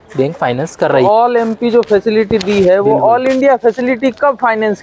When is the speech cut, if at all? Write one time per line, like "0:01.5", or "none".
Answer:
0:01.0